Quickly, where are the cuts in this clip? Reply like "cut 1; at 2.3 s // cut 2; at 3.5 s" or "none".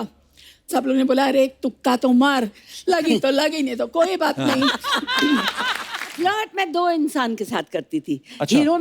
cut 1; at 6.1 s

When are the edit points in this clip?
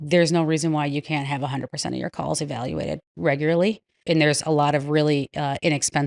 cut 1; at 4.0 s

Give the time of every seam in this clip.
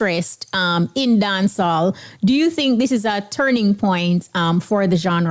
none

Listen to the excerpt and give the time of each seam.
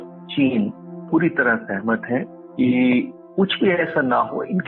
cut 1; at 1.0 s // cut 2; at 2.4 s // cut 3; at 3.2 s

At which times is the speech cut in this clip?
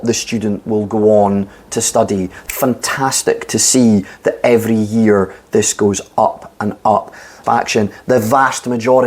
cut 1; at 2.4 s // cut 2; at 7.4 s

